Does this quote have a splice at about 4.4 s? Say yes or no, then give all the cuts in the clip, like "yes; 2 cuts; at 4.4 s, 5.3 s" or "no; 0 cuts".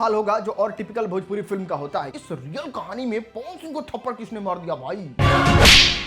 no; 1 cut; at 2.1 s